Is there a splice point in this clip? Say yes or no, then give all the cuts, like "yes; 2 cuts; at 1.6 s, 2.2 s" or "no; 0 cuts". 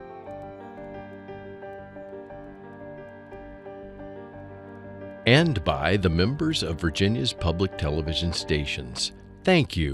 yes; 1 cut; at 5.2 s